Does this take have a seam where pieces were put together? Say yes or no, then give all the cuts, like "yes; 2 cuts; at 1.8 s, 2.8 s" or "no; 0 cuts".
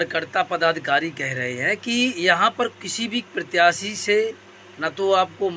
no; 0 cuts